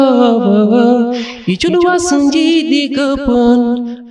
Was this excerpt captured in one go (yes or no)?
yes